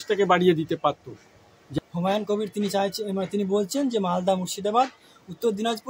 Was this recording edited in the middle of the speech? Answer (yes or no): yes